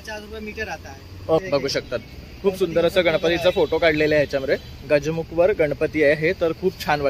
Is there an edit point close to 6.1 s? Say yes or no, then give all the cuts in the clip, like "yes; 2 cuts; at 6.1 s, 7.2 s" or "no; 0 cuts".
no; 1 cut; at 1.4 s